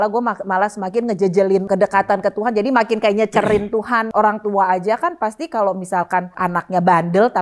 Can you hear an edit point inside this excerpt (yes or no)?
yes